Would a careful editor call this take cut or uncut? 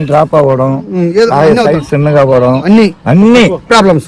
uncut